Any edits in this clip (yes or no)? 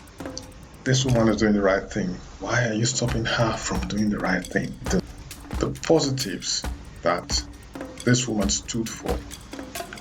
yes